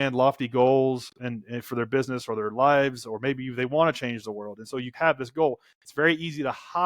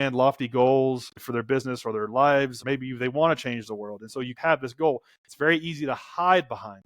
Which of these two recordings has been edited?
second; 2 cuts; at 1.1 s, 2.6 s

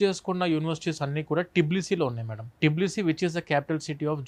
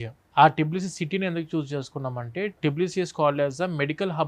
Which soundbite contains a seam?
second; 1 cut; at 2.6 s

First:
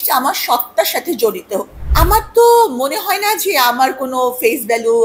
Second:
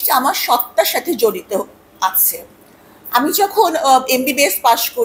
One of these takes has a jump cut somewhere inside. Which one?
first; 1 cut; at 1.8 s

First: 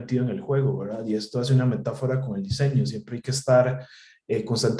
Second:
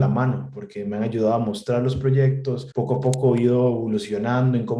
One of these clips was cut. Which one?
second; 1 cut; at 2.7 s

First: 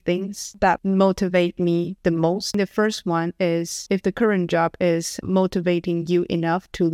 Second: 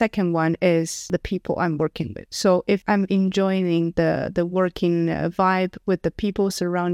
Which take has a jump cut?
first; 2 cuts; at 2.5 s, 5.1 s

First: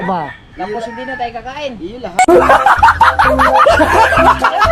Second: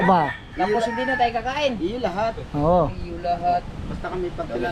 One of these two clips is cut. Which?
second; 1 cut; at 2.1 s

